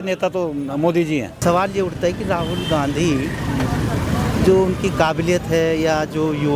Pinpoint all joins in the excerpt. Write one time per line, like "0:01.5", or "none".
0:01.3